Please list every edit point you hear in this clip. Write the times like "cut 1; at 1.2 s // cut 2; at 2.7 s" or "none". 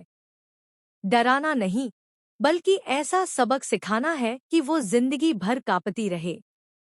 cut 1; at 3.8 s